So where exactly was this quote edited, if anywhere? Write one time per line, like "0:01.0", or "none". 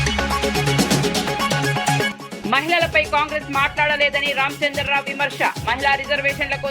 0:02.1